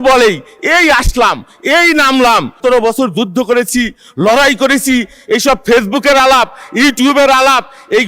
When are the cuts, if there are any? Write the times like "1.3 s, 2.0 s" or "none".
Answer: 2.6 s